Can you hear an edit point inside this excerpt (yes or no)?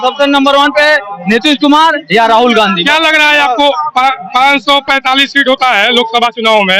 no